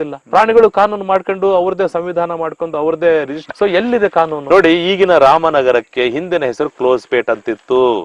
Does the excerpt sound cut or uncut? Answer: cut